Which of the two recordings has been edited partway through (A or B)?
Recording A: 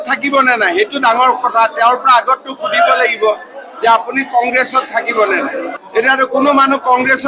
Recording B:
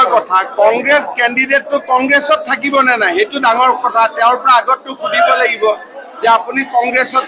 A